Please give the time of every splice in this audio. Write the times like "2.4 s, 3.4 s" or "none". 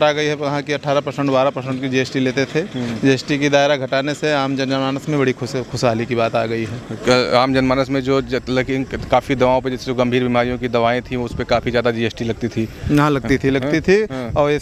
none